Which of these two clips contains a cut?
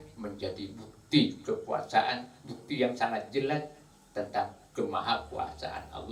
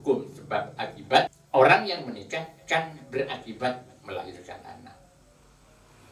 second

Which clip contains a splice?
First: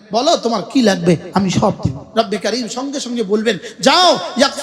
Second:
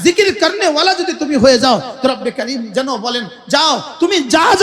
first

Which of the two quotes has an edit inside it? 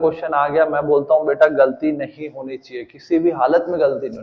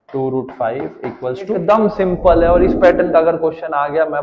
second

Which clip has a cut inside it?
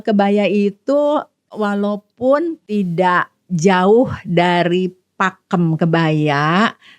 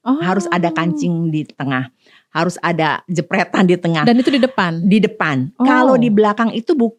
first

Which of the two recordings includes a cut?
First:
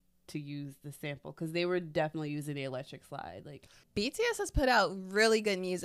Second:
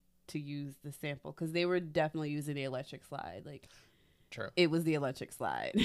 first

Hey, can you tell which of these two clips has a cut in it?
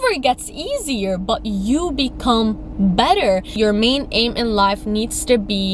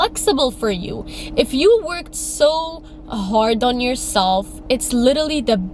first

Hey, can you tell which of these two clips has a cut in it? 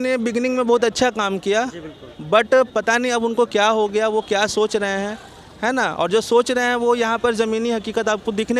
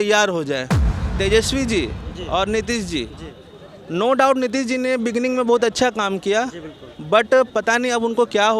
second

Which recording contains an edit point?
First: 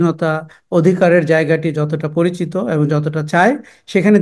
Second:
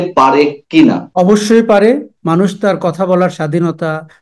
second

